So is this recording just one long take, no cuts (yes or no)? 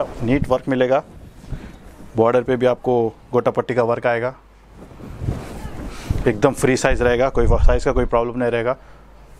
yes